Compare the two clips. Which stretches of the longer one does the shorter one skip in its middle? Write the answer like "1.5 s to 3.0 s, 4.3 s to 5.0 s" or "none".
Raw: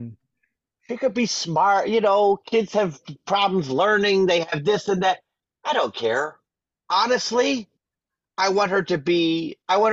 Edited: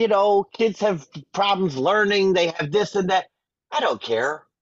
none